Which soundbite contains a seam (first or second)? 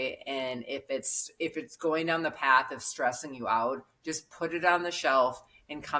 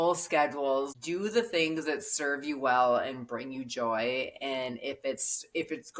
second